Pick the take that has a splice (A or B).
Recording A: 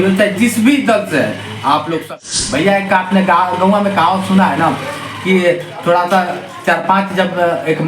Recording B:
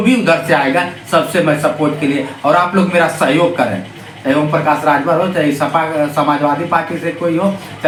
A